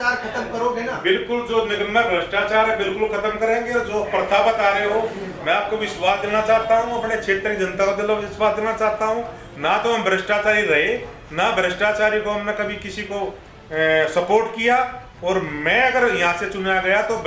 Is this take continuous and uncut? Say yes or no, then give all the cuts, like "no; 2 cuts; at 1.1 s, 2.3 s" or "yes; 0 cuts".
yes; 0 cuts